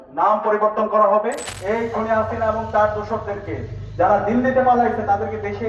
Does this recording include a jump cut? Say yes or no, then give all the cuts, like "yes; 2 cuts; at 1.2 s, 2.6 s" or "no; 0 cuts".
yes; 1 cut; at 1.5 s